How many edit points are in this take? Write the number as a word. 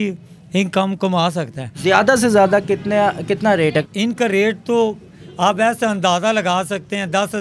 two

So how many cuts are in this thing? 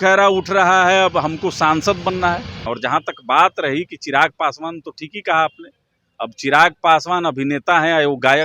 one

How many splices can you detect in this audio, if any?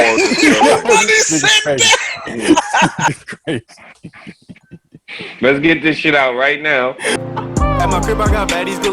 one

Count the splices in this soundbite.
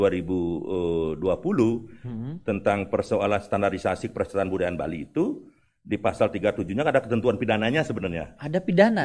zero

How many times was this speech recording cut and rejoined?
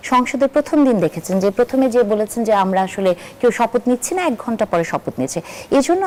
zero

